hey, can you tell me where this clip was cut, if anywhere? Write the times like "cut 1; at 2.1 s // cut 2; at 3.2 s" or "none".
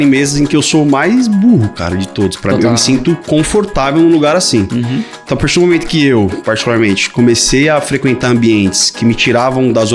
none